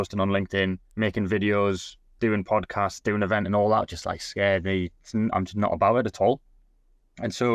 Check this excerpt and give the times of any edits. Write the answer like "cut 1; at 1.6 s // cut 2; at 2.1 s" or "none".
none